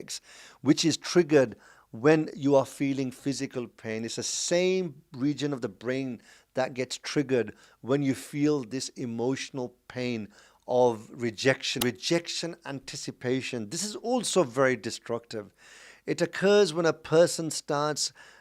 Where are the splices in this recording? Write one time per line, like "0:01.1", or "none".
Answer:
0:11.7